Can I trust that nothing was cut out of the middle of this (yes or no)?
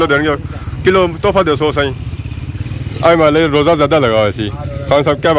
yes